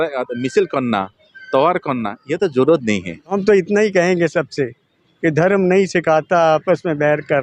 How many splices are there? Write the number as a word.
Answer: one